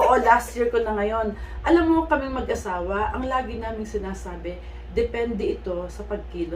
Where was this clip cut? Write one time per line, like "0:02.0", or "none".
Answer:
none